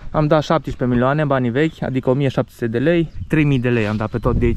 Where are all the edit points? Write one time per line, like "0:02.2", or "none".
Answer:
0:03.2